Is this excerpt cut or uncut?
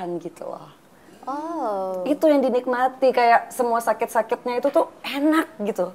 uncut